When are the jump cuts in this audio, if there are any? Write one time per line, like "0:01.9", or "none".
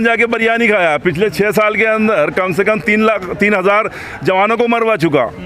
none